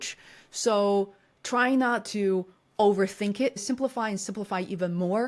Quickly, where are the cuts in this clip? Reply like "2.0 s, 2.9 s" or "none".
3.6 s